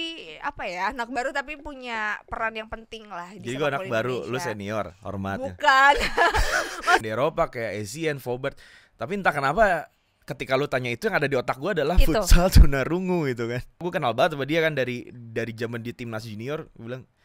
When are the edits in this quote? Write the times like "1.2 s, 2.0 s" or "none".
7.0 s, 13.9 s